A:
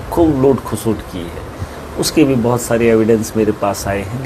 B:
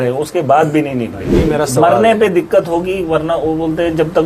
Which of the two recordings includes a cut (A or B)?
B